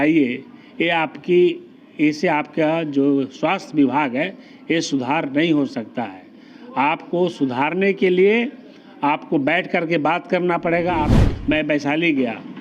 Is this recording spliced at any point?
yes; 1 cut; at 11.1 s

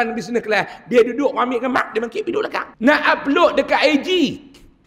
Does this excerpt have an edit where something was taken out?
yes; 1 cut; at 2.7 s

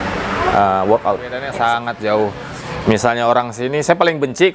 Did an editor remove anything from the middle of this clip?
yes; 1 cut; at 1.4 s

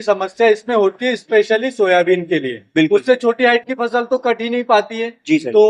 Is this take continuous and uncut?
yes; 0 cuts

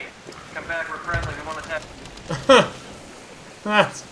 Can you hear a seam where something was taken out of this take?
no; 0 cuts

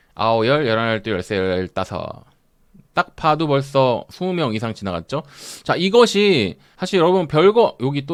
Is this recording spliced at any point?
no; 0 cuts

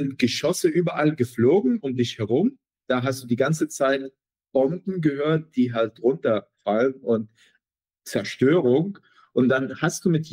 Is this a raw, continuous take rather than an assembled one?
yes; 0 cuts

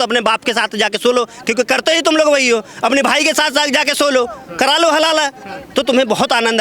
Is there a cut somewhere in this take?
no; 0 cuts

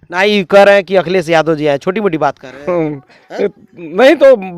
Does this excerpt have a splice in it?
no; 0 cuts

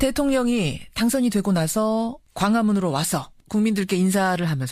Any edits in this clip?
no; 0 cuts

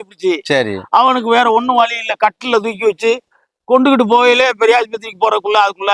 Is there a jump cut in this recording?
no; 0 cuts

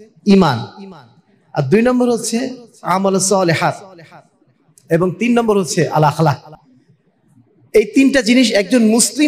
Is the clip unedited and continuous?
yes; 0 cuts

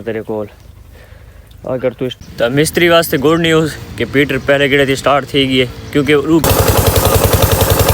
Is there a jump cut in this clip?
yes; 2 cuts; at 2.1 s, 6.4 s

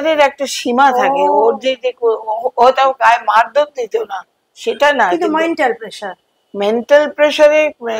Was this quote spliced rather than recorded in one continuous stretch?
no; 0 cuts

